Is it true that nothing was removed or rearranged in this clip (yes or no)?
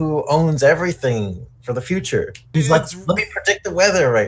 no